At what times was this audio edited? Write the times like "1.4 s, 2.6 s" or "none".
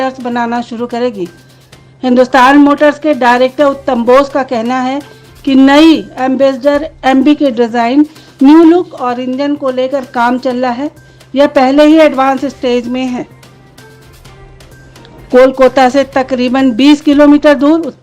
13.3 s, 14.9 s

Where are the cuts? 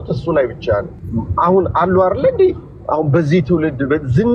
1.0 s

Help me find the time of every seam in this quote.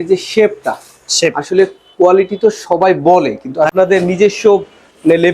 3.7 s

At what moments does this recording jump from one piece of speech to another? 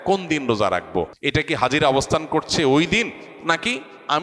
1.2 s

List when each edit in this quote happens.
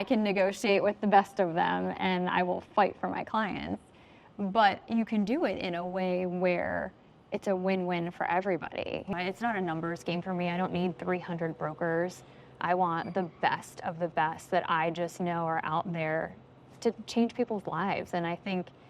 9.1 s

